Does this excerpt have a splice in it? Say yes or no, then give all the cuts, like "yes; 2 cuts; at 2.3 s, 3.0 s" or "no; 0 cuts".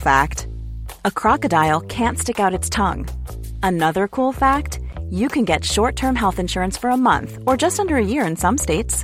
no; 0 cuts